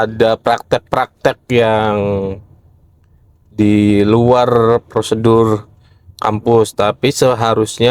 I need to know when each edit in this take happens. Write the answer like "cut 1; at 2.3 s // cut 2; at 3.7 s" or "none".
none